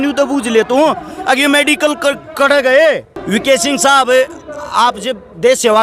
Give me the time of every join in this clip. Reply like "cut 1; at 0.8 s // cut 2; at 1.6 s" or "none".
cut 1; at 3.2 s